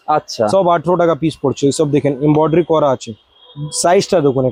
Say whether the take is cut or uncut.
uncut